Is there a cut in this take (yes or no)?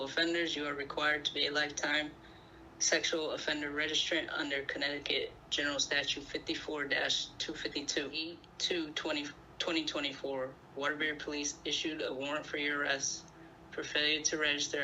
yes